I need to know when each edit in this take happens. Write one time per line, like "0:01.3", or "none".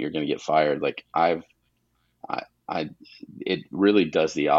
none